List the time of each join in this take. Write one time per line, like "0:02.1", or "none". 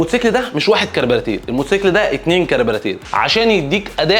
0:03.0